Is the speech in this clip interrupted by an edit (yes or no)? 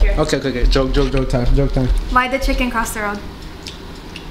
no